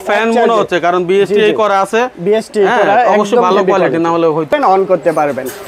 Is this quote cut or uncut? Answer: cut